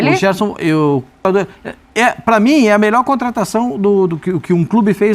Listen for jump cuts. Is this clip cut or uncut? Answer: cut